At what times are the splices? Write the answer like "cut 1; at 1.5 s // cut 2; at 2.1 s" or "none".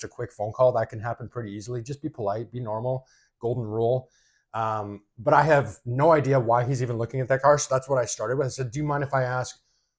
none